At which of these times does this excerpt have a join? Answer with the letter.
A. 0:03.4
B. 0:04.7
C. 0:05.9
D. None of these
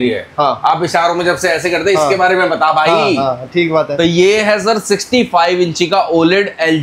D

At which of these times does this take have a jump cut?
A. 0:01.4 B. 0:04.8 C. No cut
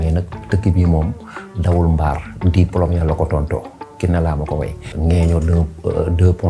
B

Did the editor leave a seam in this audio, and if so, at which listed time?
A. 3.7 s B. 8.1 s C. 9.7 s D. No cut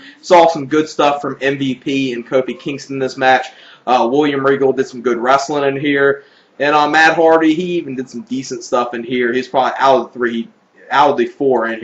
C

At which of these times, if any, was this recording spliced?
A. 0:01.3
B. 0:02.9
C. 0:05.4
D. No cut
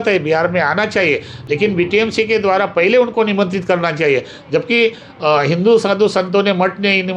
D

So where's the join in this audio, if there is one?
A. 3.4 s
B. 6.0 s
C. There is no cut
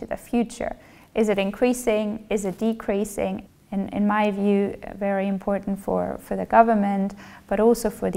A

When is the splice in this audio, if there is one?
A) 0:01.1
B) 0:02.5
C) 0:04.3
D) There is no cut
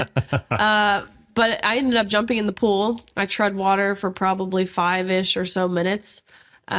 D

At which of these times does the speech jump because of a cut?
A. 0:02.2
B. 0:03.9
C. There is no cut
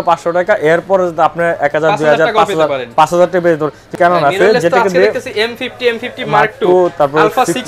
B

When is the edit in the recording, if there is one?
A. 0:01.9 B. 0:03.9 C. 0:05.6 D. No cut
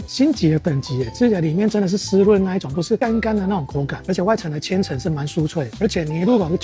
D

